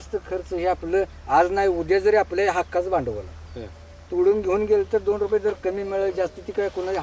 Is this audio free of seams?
yes; 0 cuts

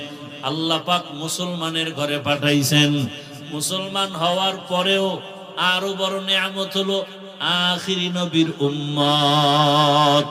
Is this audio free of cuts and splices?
yes; 0 cuts

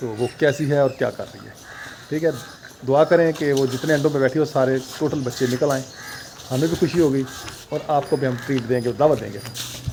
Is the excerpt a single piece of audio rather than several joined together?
yes; 0 cuts

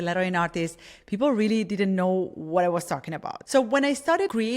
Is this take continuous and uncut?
no; 1 cut; at 3.3 s

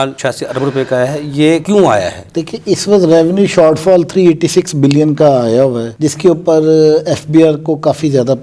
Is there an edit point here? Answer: no; 0 cuts

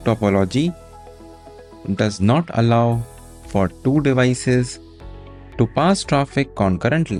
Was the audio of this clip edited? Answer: no; 0 cuts

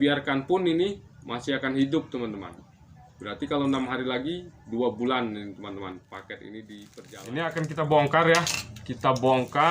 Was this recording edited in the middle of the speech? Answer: yes; 1 cut; at 6.9 s

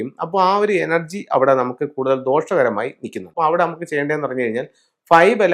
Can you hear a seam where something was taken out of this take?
yes; 1 cut; at 3.3 s

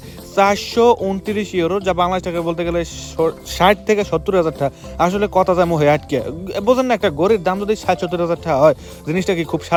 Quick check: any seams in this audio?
no; 0 cuts

